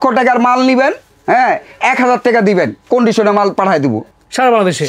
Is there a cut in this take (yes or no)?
no